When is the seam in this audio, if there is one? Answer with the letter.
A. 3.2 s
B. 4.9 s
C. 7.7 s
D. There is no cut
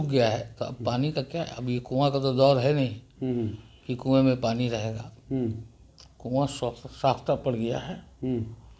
D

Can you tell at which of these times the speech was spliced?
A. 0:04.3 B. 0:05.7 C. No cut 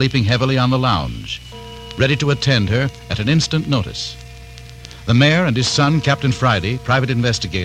B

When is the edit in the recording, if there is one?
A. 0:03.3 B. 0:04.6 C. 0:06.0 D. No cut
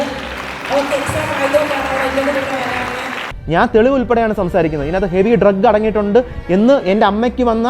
A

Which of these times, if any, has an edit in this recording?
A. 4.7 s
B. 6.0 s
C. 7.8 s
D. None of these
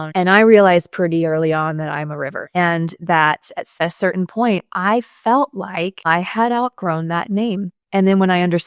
C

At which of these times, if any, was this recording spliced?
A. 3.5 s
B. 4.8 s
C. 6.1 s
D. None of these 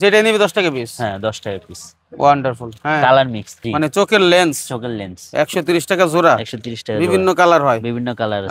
A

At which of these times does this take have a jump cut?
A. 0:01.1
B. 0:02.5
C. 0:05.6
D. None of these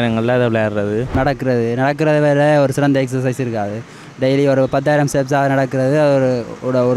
A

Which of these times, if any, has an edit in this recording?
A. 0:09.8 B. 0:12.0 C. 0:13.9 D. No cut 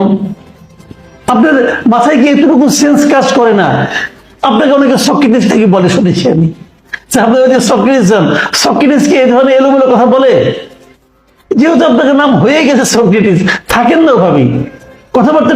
D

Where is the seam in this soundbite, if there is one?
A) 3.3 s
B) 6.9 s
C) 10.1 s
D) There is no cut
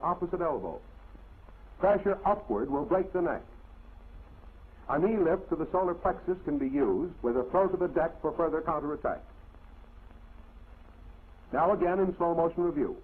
B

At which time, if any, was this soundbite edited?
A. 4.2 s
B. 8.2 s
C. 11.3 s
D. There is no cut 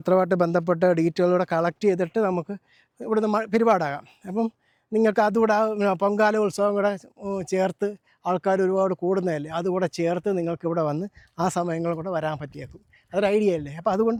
D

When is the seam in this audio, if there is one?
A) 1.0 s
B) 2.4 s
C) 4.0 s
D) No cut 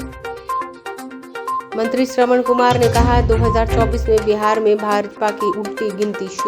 A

